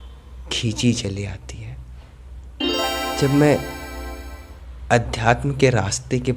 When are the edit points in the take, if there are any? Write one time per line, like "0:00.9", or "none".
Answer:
0:02.7